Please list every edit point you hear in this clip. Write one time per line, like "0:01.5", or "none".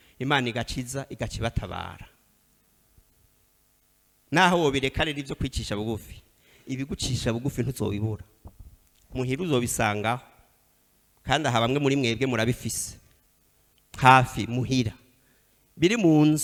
none